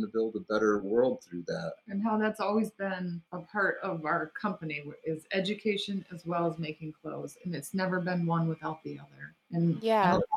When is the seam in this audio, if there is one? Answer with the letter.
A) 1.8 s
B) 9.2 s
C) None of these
C